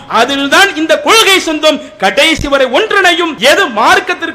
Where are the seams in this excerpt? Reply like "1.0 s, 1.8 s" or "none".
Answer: 3.3 s

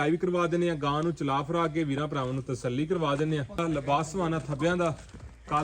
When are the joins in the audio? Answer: 3.6 s

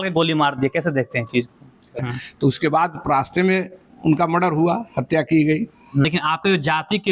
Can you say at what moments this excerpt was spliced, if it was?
2.0 s, 6.0 s

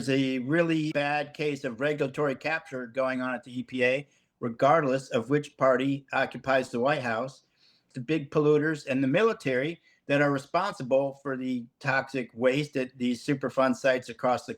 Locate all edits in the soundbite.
0.9 s

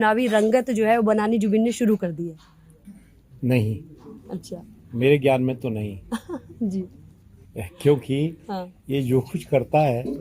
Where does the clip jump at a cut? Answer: none

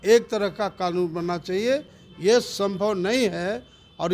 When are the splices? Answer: none

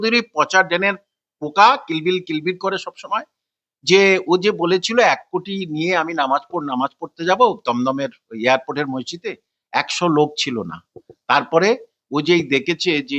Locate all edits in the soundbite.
none

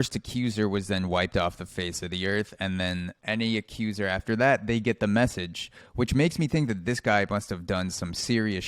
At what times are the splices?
3.1 s

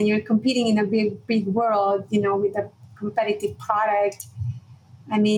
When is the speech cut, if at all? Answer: none

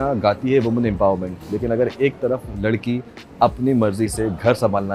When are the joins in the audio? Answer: none

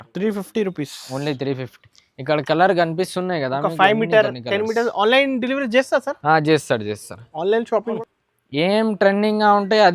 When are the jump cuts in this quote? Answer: 8.0 s

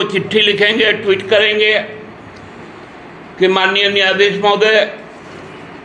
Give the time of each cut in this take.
none

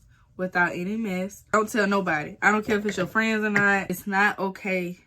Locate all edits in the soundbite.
1.5 s, 3.9 s

